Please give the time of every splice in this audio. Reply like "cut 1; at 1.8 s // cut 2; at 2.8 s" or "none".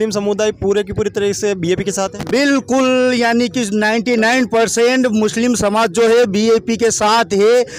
none